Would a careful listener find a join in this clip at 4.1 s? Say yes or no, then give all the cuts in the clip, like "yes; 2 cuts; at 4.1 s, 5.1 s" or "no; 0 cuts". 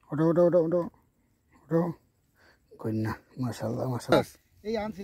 yes; 1 cut; at 4.1 s